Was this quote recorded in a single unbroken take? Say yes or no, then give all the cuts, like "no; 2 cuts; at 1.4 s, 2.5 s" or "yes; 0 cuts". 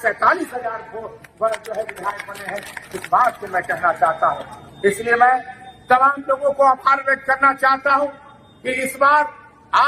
yes; 0 cuts